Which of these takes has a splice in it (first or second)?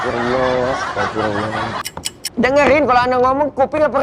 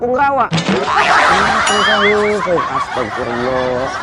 first